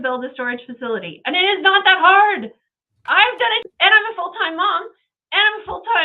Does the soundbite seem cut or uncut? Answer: cut